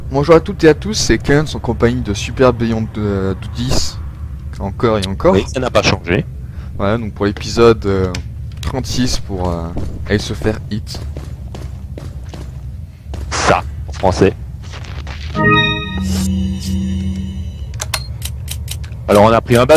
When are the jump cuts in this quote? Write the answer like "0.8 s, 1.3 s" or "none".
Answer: 2.1 s